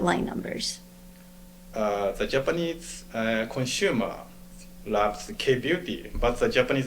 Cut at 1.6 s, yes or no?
yes